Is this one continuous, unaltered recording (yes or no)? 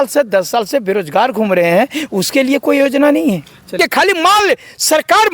no